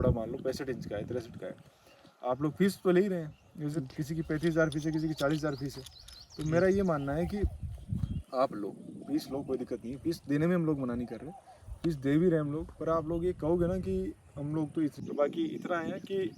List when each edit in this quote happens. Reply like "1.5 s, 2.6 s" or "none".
15.0 s